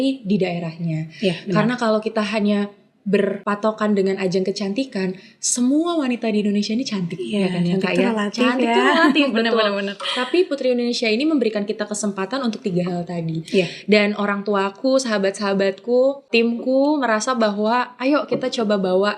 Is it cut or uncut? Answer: cut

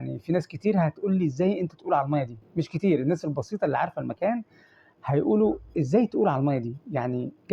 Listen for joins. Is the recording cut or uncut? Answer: uncut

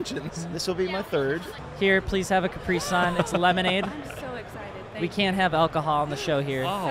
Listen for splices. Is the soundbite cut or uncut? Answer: cut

